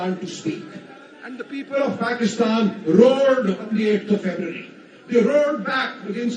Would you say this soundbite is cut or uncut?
uncut